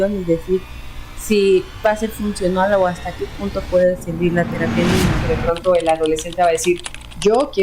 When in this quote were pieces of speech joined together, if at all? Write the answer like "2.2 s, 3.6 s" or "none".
5.2 s